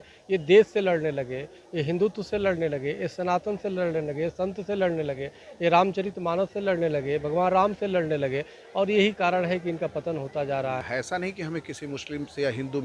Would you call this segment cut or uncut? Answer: cut